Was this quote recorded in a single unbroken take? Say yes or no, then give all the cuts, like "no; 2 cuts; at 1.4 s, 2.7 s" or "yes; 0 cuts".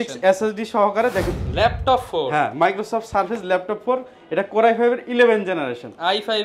no; 1 cut; at 1.3 s